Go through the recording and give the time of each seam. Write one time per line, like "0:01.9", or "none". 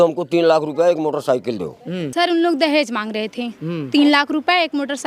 0:02.0